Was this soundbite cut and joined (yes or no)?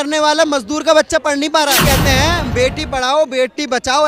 yes